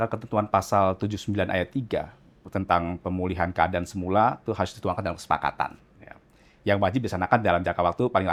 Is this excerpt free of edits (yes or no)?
yes